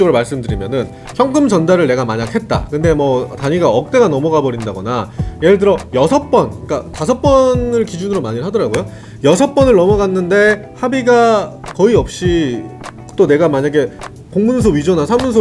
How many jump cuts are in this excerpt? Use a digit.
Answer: 0